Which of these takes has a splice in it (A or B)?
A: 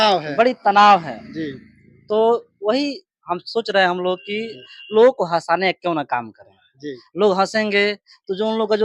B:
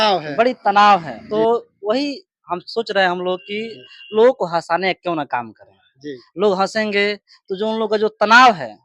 B